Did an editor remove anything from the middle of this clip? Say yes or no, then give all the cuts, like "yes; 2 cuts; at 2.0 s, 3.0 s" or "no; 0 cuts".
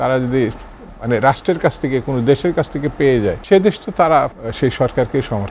yes; 2 cuts; at 3.4 s, 4.4 s